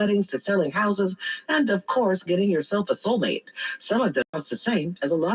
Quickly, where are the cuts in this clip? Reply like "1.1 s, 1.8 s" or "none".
4.3 s